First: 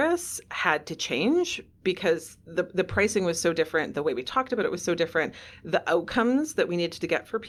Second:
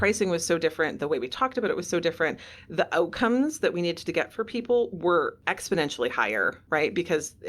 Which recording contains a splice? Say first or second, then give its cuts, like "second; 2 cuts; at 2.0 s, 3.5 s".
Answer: second; 2 cuts; at 5.5 s, 6.6 s